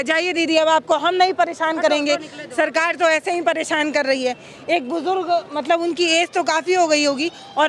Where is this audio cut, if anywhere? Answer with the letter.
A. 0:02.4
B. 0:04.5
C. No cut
C